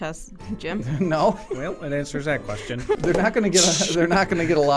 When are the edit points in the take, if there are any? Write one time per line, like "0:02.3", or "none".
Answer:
0:03.0